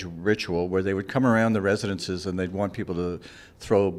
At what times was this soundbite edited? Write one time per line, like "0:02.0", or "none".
none